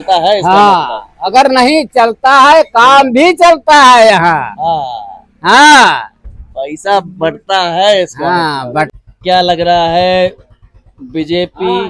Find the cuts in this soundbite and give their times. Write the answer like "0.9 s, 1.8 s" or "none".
8.9 s

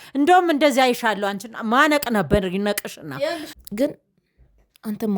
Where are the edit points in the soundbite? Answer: 3.5 s

